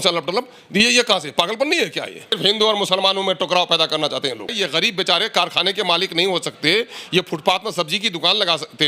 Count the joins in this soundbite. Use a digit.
2